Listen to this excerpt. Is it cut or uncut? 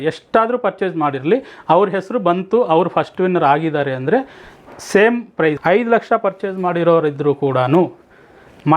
cut